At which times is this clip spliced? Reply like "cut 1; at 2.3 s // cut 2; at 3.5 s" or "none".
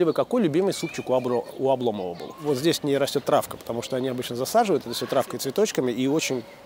cut 1; at 2.3 s

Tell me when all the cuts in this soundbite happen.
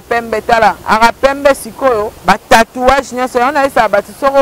cut 1; at 0.8 s // cut 2; at 2.1 s

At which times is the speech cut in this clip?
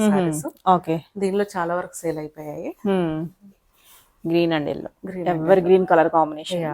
none

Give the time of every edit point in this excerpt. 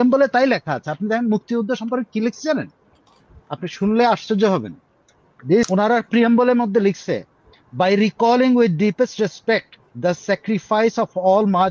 cut 1; at 5.7 s

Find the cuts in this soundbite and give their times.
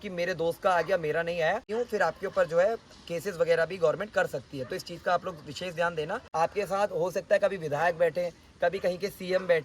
cut 1; at 1.7 s // cut 2; at 6.2 s

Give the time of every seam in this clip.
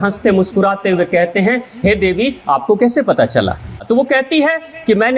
cut 1; at 3.8 s

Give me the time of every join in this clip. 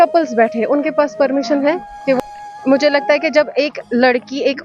cut 1; at 2.2 s

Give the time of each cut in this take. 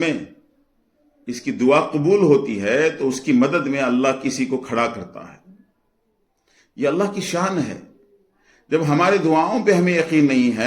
none

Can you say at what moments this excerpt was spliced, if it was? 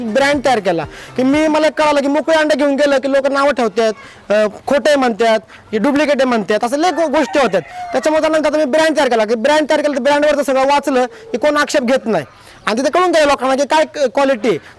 none

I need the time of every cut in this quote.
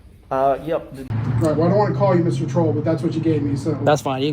cut 1; at 1.0 s

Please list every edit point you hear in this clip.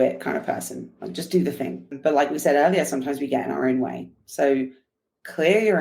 cut 1; at 2.0 s

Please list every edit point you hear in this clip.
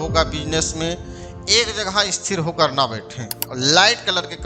cut 1; at 3.4 s

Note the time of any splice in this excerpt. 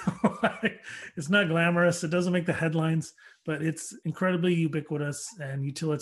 cut 1; at 3.9 s

